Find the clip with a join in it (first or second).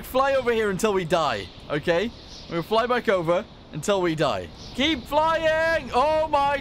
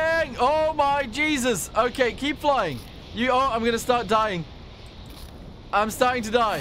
first